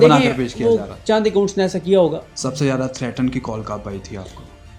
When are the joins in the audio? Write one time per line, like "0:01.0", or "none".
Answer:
0:02.3